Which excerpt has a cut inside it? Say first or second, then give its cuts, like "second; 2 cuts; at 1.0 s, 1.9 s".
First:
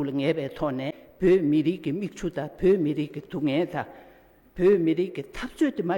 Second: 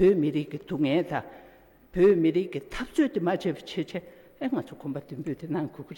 first; 1 cut; at 1.0 s